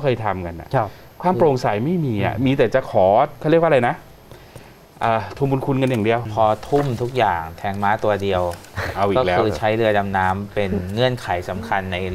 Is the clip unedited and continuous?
no; 1 cut; at 6.3 s

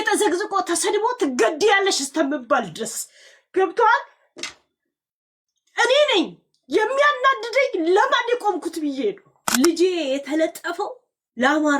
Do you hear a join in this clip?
yes; 1 cut; at 9.3 s

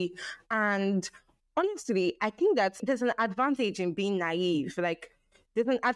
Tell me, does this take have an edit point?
yes; 1 cut; at 2.8 s

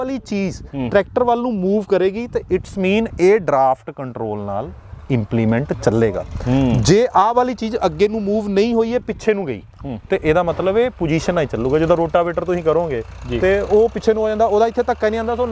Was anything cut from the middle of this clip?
no; 0 cuts

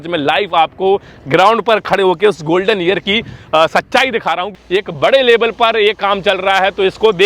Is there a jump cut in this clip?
yes; 1 cut; at 4.5 s

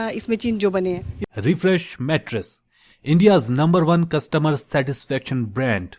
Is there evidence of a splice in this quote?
yes; 1 cut; at 1.1 s

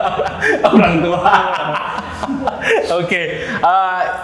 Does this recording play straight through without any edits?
yes; 0 cuts

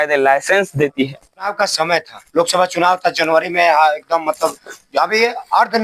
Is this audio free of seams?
no; 1 cut; at 1.5 s

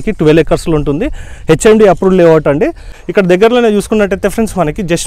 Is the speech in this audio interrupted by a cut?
yes; 1 cut; at 2.9 s

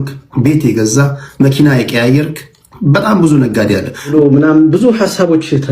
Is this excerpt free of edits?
no; 1 cut; at 4.1 s

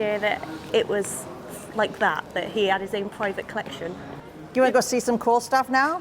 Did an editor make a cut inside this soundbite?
yes; 1 cut; at 4.2 s

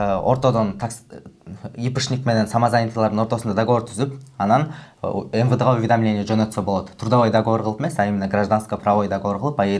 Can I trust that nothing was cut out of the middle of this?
yes; 0 cuts

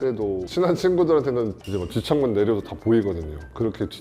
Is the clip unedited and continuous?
no; 1 cut; at 1.6 s

